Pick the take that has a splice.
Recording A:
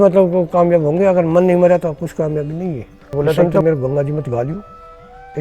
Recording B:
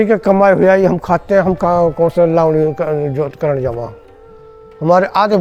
A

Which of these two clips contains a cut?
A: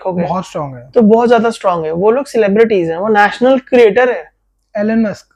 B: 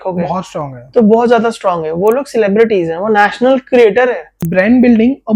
B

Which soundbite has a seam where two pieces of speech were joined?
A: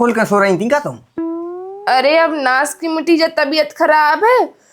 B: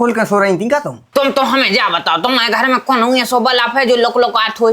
B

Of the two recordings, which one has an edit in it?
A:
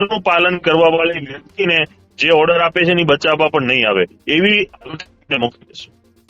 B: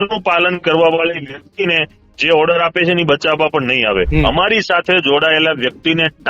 B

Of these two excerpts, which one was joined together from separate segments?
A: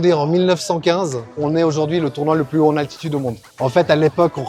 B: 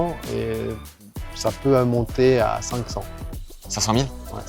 A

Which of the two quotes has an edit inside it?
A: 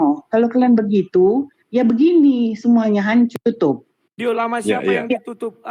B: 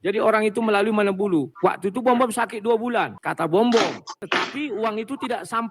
B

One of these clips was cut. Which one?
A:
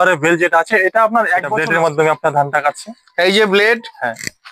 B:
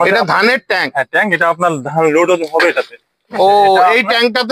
A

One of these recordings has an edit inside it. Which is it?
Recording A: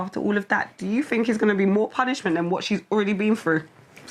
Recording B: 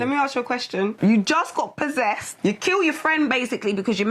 B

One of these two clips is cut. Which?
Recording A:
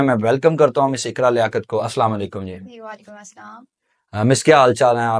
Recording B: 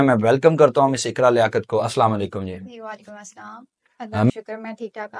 B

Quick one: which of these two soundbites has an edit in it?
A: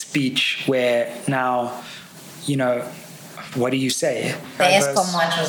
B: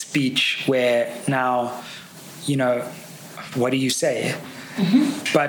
A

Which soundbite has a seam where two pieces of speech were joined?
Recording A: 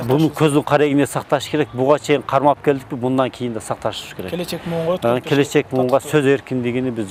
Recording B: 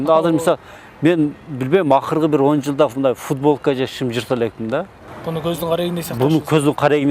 B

